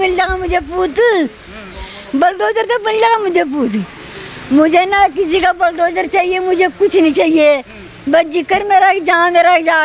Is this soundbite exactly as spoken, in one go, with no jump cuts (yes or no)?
yes